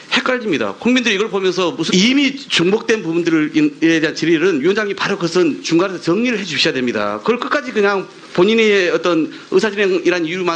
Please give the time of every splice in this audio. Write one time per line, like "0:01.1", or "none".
none